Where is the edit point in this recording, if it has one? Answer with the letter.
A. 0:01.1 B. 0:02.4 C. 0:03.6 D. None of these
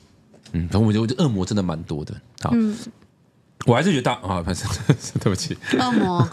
D